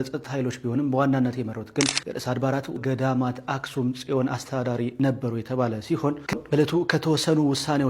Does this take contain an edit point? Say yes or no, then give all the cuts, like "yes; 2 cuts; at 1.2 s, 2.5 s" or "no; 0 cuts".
yes; 1 cut; at 6.3 s